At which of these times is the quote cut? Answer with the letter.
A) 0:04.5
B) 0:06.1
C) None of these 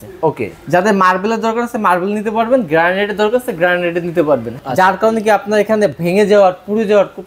A